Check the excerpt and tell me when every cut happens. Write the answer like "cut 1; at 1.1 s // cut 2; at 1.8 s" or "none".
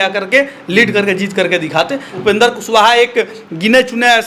cut 1; at 2.1 s